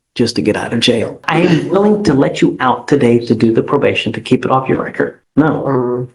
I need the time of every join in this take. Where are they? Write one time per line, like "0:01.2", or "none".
0:01.2
0:05.2